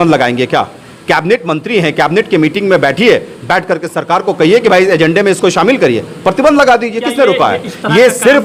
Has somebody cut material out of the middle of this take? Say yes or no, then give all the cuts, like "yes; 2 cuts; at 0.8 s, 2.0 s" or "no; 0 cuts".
no; 0 cuts